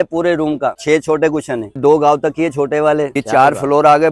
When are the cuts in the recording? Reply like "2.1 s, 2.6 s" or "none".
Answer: 0.8 s, 1.8 s, 3.1 s